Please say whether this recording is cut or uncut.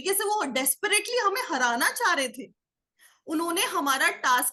uncut